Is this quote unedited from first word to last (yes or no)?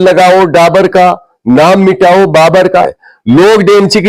no